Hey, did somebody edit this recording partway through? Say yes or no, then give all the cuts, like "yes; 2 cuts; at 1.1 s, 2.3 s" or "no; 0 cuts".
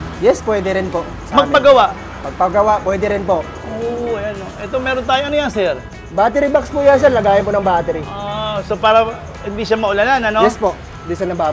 no; 0 cuts